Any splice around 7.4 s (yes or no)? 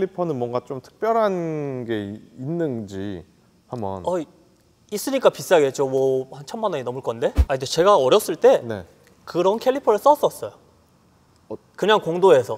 yes